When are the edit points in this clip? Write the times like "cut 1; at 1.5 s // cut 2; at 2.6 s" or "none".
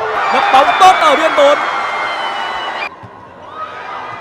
cut 1; at 2.9 s

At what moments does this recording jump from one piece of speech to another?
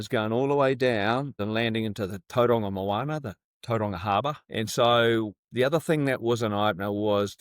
cut 1; at 1.4 s // cut 2; at 4.4 s

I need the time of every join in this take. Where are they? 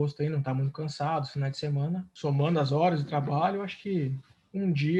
cut 1; at 2.1 s

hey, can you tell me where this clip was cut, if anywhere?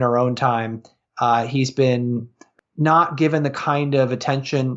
cut 1; at 2.3 s

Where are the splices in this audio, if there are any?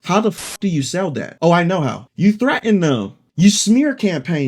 cut 1; at 1.3 s // cut 2; at 2.0 s

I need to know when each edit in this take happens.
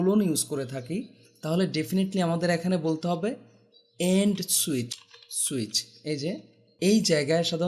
cut 1; at 4.9 s // cut 2; at 6.7 s

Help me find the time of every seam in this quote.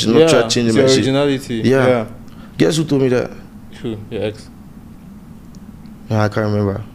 cut 1; at 3.5 s

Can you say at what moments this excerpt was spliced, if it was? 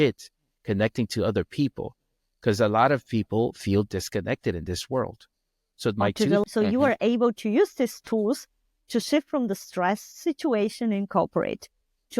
cut 1; at 6.4 s

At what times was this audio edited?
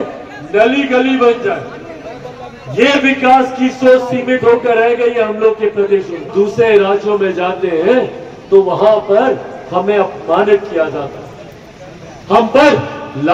cut 1; at 6.3 s

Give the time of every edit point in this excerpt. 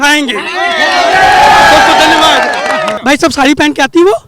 cut 1; at 2.9 s

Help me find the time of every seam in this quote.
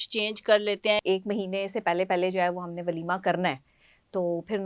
cut 1; at 1.0 s

